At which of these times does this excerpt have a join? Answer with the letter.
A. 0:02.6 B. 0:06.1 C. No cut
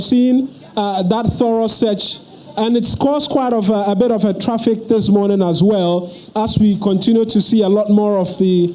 C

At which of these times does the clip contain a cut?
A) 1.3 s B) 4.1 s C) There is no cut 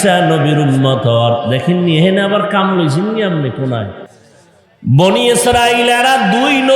B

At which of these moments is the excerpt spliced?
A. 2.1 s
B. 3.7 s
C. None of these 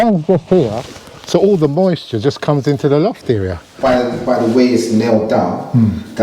B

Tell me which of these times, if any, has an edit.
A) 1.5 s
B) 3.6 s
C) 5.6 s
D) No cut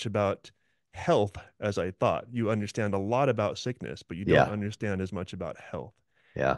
D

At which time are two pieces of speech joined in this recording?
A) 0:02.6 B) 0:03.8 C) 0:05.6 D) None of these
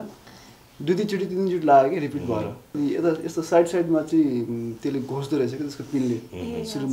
A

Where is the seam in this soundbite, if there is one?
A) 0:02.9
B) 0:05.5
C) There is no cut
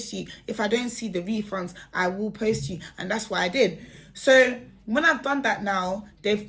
C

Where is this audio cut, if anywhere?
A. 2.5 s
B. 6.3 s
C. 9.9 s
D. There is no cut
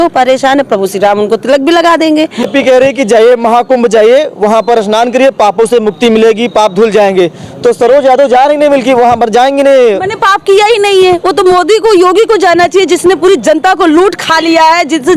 A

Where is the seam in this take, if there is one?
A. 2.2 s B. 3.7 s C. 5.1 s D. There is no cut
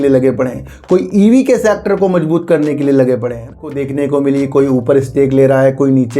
B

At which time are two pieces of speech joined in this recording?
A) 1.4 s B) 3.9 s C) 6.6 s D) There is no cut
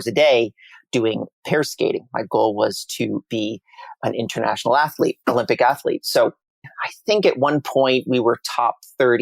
C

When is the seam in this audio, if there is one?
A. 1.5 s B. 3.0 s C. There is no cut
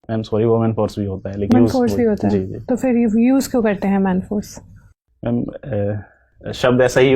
A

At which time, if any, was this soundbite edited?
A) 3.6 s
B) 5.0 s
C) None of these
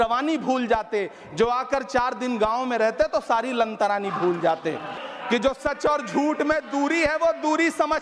B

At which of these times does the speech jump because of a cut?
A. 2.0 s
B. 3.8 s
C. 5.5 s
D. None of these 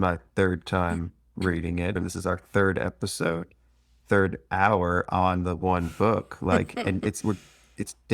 A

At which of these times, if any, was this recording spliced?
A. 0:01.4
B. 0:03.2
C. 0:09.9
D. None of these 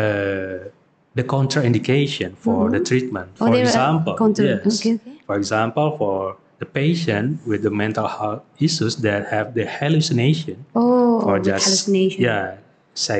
D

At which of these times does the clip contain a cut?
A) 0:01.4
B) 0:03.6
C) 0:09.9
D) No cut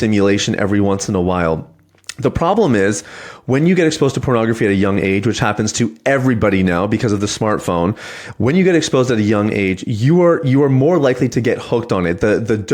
D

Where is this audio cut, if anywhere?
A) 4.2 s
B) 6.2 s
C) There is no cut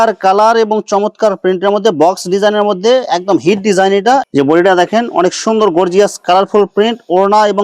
A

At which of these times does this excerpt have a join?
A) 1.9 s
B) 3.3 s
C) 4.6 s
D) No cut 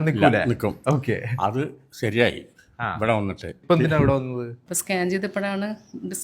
C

